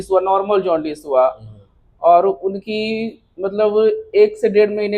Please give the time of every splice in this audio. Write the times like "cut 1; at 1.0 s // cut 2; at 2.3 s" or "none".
none